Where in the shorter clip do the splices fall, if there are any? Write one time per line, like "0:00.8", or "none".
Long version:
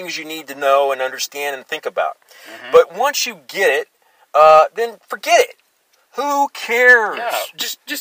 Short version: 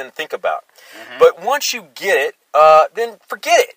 0:02.4